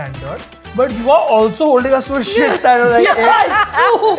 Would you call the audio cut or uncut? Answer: uncut